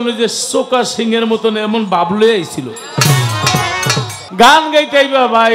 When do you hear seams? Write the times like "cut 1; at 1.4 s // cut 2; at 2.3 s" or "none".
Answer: cut 1; at 4.2 s